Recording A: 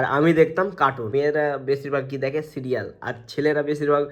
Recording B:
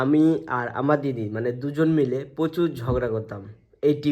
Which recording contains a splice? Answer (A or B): A